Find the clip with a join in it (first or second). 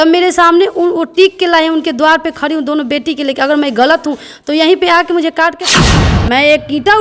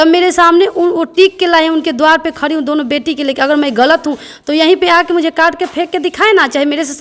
first